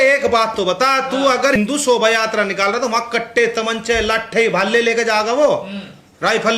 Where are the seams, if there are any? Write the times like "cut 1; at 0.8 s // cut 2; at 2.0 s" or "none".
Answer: cut 1; at 1.6 s